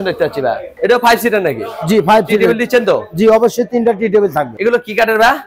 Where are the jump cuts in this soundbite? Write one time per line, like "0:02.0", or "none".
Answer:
0:00.8
0:04.5